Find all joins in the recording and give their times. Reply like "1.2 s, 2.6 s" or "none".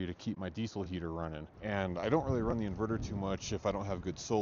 1.5 s